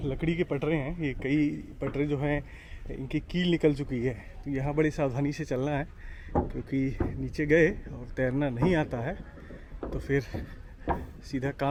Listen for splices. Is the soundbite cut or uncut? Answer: uncut